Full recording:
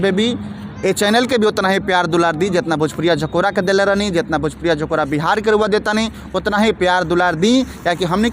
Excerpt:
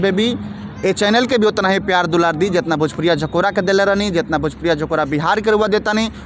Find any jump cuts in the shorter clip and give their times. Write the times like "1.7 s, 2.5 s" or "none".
none